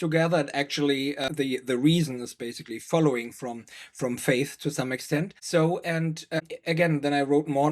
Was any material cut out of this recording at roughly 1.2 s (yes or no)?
yes